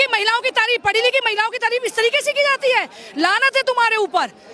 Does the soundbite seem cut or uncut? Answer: uncut